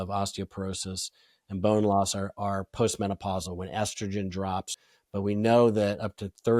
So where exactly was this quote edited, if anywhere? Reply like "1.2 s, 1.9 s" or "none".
4.8 s